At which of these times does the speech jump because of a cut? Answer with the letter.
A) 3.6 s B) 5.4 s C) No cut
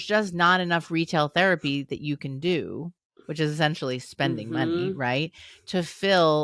C